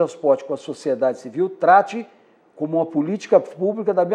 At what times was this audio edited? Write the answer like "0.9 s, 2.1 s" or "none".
none